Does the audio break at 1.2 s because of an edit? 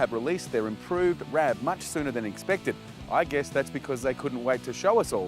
yes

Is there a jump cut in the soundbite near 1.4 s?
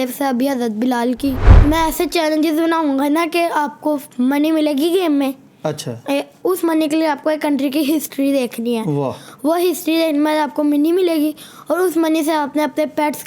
yes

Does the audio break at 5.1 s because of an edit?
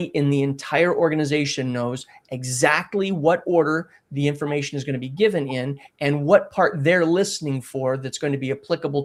no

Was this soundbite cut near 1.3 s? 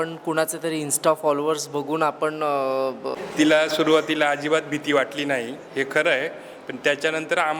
no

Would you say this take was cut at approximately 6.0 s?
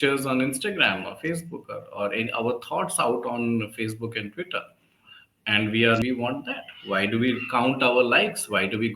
yes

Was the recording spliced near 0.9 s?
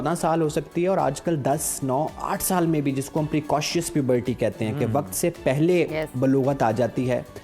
no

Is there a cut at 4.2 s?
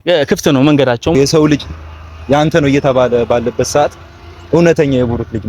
no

